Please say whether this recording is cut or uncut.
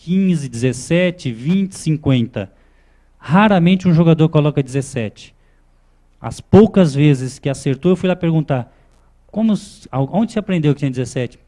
cut